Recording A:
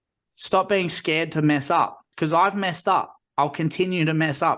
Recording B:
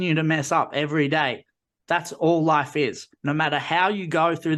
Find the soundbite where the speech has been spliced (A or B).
A